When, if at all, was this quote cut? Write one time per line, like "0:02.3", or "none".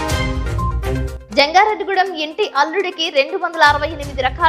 0:01.1